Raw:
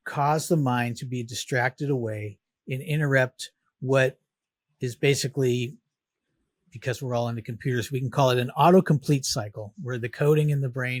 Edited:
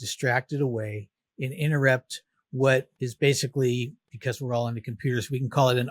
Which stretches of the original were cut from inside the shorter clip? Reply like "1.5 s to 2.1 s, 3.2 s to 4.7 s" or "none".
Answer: 4.3 s to 4.8 s, 5.9 s to 6.7 s